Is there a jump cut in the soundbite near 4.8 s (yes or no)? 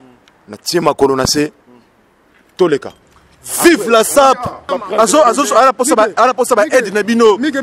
yes